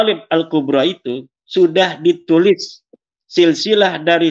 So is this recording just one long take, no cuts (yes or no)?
yes